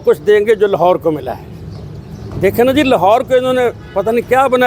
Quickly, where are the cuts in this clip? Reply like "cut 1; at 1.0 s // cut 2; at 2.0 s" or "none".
none